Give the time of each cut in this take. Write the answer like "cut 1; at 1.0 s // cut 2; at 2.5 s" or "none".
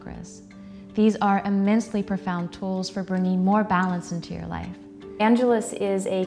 cut 1; at 5.2 s